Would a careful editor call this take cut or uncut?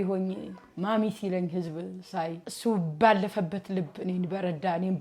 cut